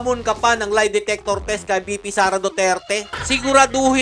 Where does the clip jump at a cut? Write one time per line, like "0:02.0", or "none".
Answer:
0:03.1